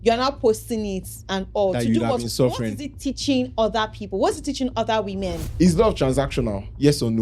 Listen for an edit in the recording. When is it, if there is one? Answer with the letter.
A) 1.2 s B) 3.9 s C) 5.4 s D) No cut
C